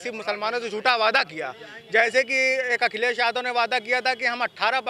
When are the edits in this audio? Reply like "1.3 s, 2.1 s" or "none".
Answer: none